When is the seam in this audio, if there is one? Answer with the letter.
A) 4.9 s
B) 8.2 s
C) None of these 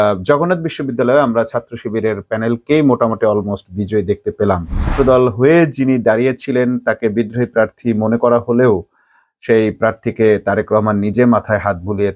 A